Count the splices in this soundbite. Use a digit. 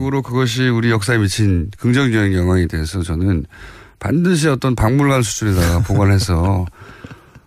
0